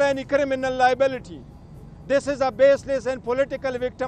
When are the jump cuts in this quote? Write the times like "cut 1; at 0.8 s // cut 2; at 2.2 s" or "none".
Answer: none